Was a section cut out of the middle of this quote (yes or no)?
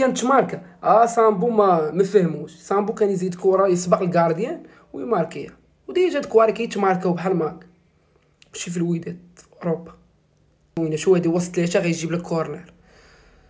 yes